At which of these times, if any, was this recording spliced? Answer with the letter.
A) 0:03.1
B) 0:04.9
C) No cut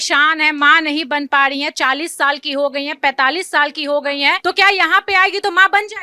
C